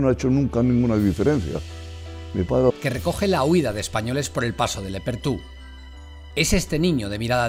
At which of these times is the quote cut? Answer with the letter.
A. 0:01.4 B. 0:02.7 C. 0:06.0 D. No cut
D